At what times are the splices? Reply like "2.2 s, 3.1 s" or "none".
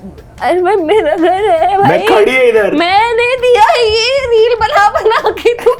none